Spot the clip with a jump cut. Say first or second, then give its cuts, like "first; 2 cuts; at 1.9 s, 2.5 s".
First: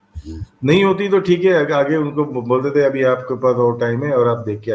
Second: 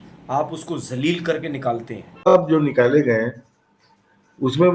second; 1 cut; at 2.3 s